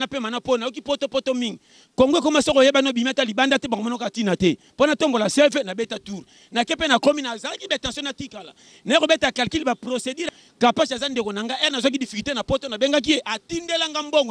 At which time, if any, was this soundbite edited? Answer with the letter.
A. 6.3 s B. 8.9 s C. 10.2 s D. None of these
C